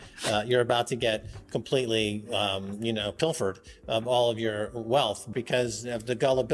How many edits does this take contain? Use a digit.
1